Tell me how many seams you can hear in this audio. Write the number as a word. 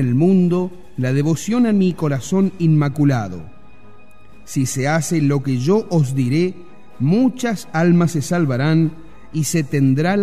one